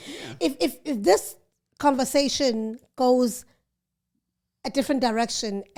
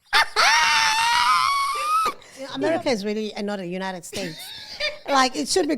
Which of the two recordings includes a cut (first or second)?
second